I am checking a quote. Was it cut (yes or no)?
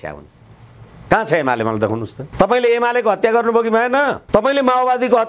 yes